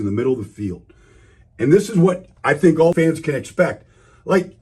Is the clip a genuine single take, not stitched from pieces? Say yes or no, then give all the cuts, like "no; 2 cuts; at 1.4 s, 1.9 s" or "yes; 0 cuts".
no; 1 cut; at 2.9 s